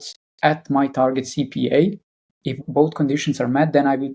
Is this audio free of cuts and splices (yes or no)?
no